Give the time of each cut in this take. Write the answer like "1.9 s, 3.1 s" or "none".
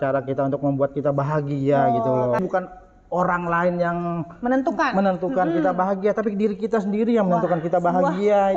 2.4 s